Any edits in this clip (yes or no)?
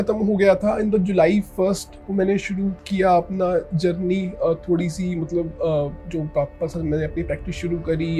no